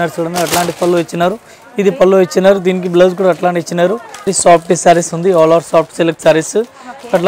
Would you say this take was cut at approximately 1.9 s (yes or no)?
no